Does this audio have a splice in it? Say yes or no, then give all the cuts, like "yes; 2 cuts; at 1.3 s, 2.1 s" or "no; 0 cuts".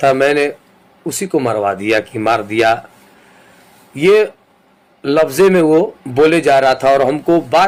no; 0 cuts